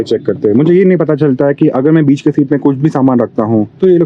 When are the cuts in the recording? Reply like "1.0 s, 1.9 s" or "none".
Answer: none